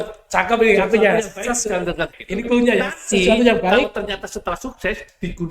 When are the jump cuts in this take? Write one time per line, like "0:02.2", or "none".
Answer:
0:02.1